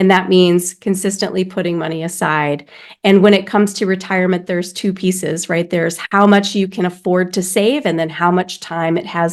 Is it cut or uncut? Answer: uncut